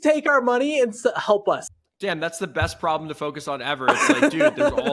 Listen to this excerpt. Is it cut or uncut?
cut